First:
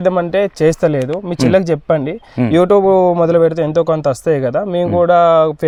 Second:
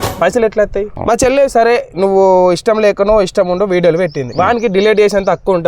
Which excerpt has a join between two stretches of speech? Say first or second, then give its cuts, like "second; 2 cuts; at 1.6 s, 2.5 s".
second; 2 cuts; at 0.9 s, 4.2 s